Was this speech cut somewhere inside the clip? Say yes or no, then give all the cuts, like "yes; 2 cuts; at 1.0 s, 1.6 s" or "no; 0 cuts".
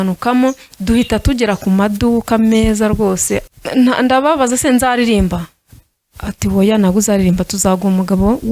yes; 1 cut; at 3.5 s